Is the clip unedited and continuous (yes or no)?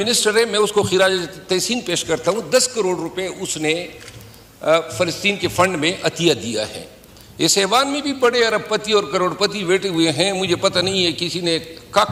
yes